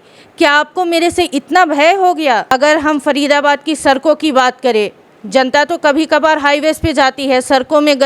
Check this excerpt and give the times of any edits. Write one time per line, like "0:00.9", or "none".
0:02.5